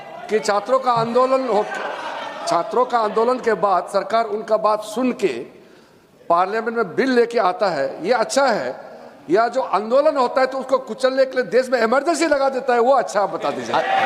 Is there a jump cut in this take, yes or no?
no